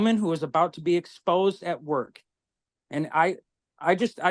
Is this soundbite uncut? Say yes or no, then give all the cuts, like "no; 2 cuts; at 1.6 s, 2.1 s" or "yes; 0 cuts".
yes; 0 cuts